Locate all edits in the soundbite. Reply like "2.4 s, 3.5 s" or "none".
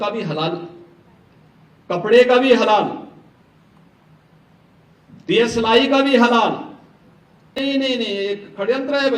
7.6 s